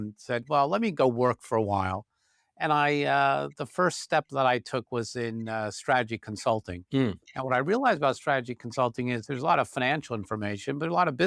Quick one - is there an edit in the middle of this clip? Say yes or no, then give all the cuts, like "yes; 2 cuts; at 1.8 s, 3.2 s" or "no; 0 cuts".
no; 0 cuts